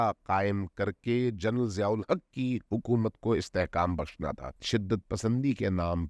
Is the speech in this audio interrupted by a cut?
yes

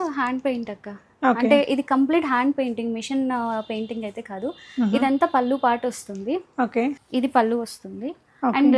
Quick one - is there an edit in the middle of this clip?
yes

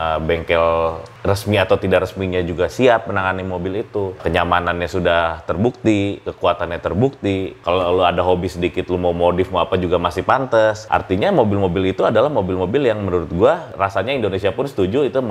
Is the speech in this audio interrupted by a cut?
yes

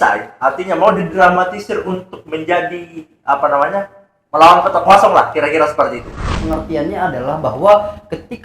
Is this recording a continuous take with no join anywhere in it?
no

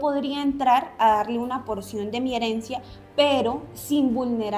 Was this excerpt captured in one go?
yes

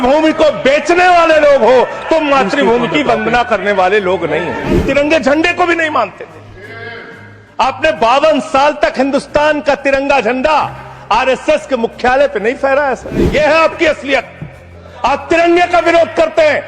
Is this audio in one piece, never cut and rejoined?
no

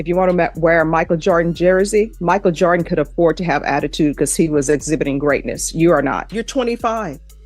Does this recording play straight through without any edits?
no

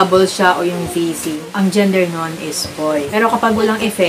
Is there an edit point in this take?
yes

